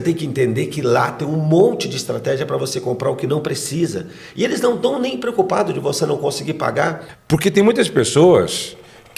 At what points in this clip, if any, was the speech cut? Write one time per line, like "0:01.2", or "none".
0:07.1

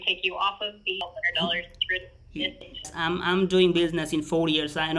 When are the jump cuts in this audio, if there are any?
0:01.0
0:02.9

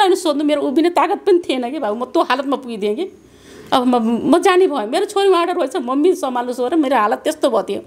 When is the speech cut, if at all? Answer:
none

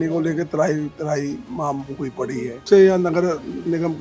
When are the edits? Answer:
0:02.6

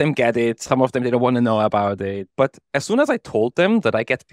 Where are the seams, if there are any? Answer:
0:02.2

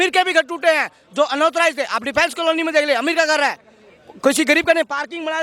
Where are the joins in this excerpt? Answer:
none

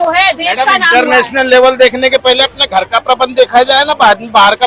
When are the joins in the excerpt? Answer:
none

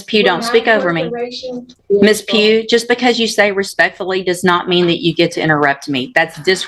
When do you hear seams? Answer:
0:01.8

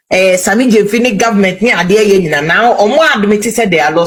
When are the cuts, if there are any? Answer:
none

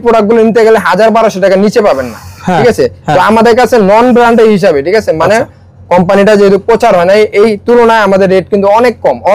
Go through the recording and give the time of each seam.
none

